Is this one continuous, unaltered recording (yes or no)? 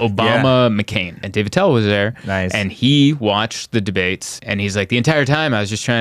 no